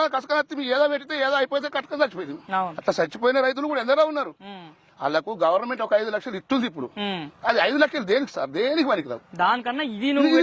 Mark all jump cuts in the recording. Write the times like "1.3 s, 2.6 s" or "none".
none